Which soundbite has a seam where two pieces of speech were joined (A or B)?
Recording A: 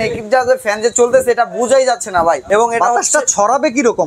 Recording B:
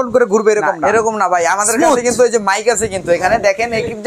A